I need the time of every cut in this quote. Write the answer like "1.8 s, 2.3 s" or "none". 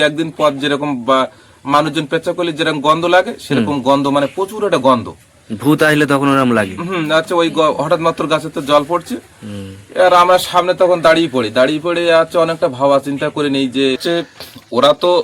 14.0 s